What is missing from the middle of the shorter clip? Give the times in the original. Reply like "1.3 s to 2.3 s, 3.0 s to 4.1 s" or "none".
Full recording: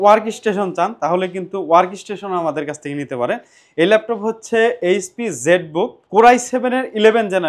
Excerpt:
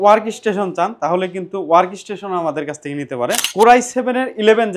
3.4 s to 6.0 s